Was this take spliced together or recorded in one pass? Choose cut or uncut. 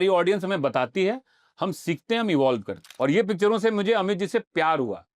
cut